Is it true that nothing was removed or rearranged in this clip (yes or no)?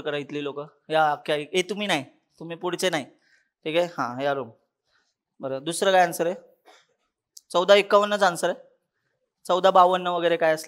yes